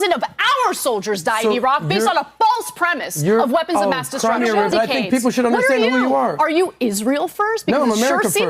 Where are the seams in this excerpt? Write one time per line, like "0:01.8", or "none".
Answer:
0:04.7